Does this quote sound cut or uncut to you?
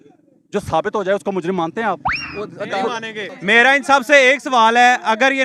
cut